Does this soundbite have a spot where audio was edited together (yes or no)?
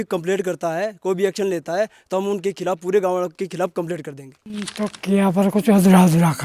yes